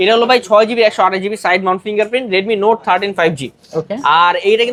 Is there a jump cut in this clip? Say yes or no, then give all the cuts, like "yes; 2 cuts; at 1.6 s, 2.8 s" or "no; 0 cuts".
no; 0 cuts